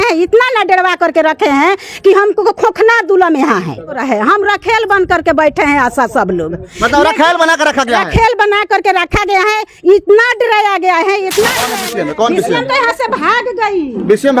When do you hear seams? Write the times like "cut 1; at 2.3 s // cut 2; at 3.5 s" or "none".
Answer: cut 1; at 4.0 s // cut 2; at 11.7 s